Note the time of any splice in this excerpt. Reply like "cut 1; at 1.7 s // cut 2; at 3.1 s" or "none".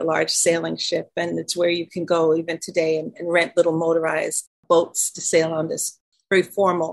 cut 1; at 4.4 s // cut 2; at 6.0 s